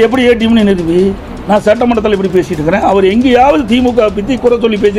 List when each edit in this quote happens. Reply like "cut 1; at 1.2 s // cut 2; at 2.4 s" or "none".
none